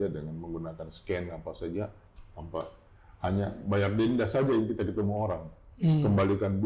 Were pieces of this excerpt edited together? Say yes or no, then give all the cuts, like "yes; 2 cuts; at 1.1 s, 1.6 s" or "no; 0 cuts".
no; 0 cuts